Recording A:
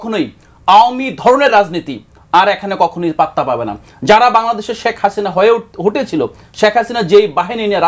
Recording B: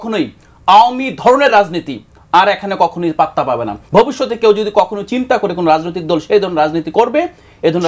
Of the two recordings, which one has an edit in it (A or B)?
B